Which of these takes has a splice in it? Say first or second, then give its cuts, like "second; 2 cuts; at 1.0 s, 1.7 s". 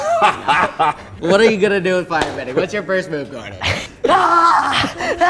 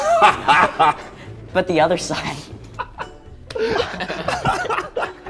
first; 2 cuts; at 1.2 s, 3.9 s